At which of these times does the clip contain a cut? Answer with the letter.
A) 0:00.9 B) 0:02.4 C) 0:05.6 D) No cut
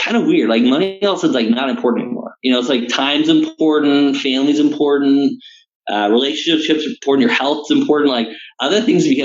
A